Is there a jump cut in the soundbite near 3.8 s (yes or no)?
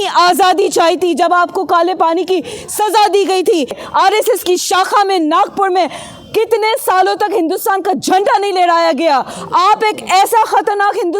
yes